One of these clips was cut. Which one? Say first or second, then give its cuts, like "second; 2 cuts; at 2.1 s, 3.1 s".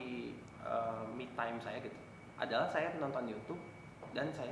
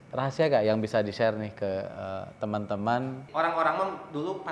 second; 1 cut; at 3.2 s